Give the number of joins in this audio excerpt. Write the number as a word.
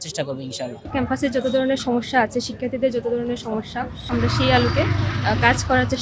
two